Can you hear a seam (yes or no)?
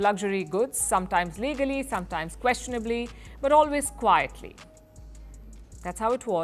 no